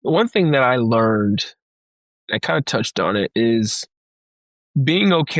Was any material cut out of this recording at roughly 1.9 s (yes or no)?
no